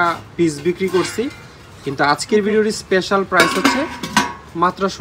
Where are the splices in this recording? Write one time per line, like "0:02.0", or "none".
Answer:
none